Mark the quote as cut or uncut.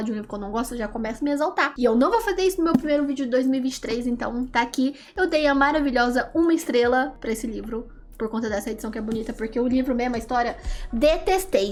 uncut